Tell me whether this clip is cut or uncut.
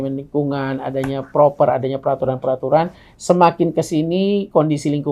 uncut